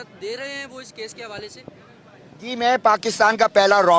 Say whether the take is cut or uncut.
cut